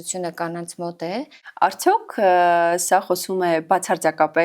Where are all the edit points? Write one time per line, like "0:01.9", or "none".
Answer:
0:01.4